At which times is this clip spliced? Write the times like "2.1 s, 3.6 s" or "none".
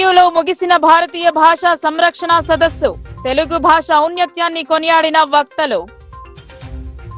none